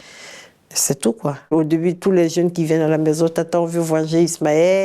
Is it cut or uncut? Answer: cut